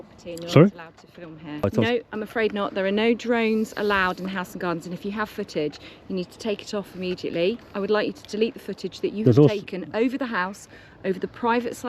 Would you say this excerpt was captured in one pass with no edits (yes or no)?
no